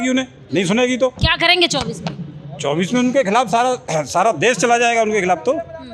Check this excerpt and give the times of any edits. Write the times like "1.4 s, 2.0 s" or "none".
none